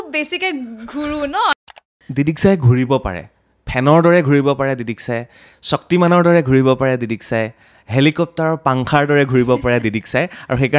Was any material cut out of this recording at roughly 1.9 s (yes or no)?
yes